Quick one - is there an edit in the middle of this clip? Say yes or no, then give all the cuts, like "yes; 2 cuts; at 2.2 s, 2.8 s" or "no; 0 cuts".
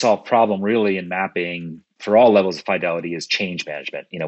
no; 0 cuts